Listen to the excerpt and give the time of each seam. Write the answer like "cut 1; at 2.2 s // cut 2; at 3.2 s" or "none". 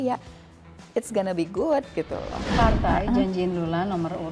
cut 1; at 2.4 s